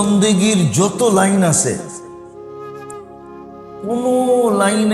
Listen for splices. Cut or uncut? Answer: uncut